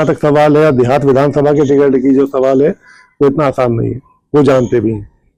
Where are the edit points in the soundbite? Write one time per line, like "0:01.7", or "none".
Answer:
none